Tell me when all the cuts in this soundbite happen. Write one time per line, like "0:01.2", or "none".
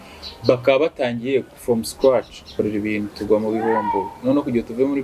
0:02.5

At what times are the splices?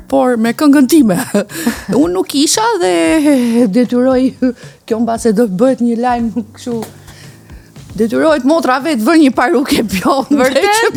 none

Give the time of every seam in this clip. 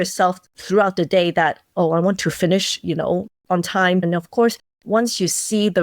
0:04.0

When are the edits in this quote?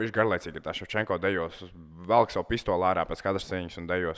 none

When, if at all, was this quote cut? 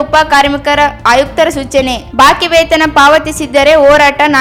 none

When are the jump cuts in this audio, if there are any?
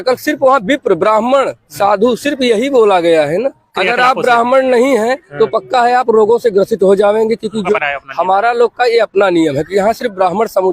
0:03.6
0:07.7

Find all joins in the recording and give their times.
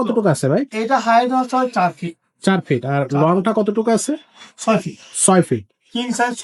none

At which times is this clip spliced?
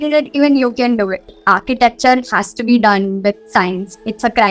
0:01.3

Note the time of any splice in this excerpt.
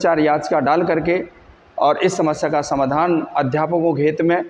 none

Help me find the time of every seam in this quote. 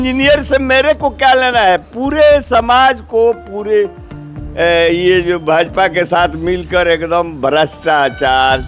none

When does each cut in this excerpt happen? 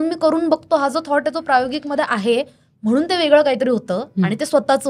none

